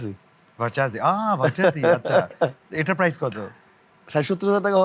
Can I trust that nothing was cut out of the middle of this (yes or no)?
yes